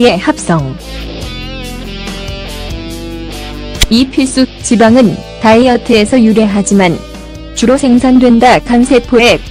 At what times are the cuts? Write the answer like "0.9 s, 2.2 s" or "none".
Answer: 1.6 s